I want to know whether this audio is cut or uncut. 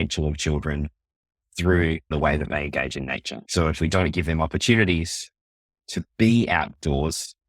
cut